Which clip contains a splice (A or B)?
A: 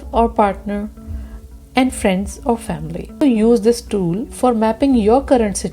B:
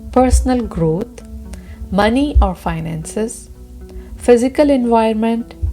A